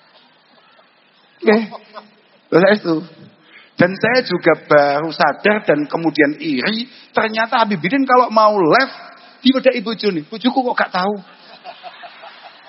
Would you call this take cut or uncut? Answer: uncut